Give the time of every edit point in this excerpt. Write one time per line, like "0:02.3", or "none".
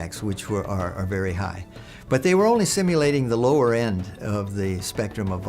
0:01.9